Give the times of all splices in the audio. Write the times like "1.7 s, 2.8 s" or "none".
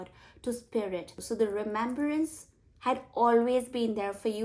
1.2 s